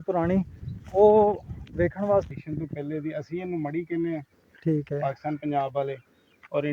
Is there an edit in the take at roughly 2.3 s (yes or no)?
yes